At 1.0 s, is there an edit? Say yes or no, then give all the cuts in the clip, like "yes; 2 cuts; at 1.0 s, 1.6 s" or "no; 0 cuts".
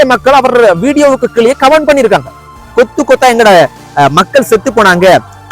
no; 1 cut; at 2.6 s